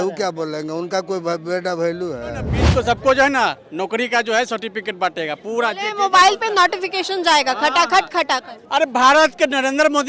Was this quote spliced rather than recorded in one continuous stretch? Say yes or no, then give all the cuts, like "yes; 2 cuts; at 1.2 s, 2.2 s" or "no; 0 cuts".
yes; 1 cut; at 2.6 s